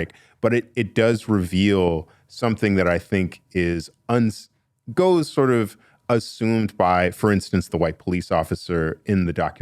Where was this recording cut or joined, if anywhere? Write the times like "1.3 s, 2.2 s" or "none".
none